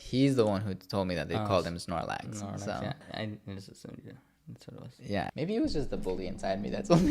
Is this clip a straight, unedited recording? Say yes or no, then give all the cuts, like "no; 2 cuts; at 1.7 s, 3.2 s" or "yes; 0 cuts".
no; 2 cuts; at 3.0 s, 5.3 s